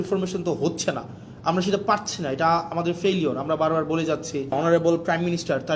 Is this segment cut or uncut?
cut